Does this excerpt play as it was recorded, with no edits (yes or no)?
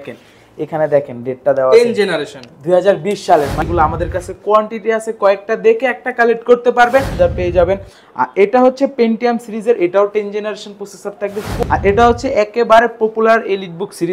no